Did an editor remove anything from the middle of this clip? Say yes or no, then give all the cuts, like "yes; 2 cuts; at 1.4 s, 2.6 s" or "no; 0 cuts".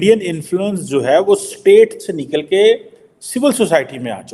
no; 0 cuts